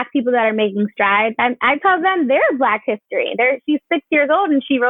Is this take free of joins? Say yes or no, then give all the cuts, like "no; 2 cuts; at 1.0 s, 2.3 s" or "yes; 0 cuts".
yes; 0 cuts